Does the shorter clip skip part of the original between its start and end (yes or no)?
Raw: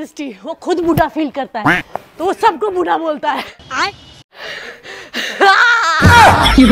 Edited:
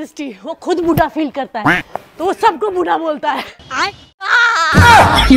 yes